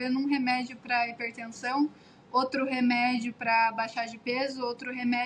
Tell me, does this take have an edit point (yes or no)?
no